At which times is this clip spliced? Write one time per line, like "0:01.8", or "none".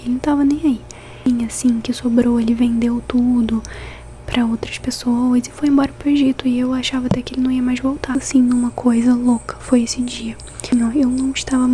0:01.1
0:08.1
0:10.6